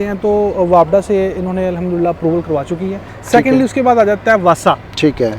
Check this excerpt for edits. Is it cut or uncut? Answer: cut